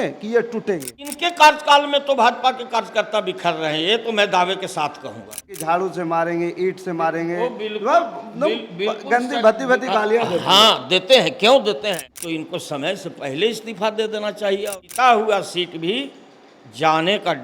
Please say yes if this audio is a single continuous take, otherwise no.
no